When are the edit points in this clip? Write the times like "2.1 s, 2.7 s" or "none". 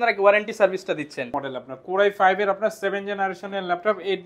1.3 s